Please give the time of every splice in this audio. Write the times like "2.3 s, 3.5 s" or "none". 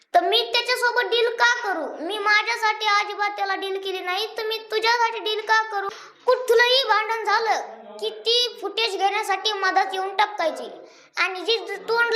6.0 s